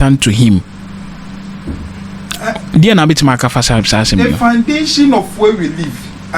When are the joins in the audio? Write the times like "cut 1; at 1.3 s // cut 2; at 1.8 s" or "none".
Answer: none

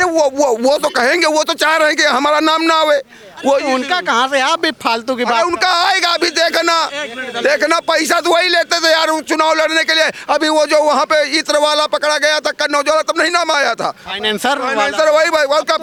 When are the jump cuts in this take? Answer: none

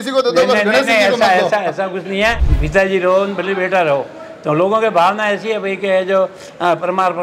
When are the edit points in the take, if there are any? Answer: cut 1; at 2.5 s

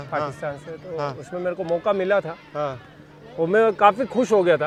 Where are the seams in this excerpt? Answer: none

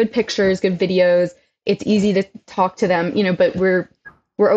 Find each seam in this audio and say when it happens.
none

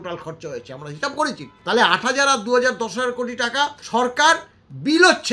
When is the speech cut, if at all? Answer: cut 1; at 1.5 s // cut 2; at 3.8 s

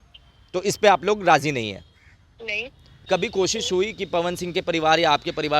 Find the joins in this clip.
cut 1; at 3.0 s

